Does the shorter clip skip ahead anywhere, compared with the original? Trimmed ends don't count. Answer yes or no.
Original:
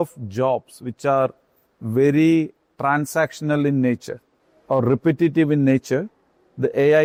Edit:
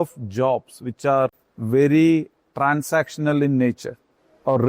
yes